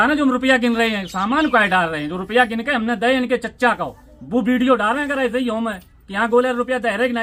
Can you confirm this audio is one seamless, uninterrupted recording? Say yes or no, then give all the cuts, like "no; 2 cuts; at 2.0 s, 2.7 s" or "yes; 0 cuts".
yes; 0 cuts